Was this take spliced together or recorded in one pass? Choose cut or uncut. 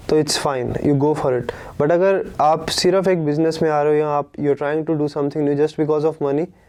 uncut